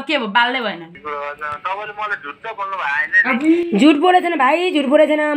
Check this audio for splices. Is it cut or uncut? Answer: cut